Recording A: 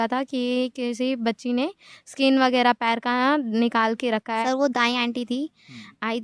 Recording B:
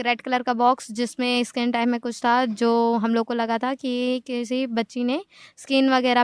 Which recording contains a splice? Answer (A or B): A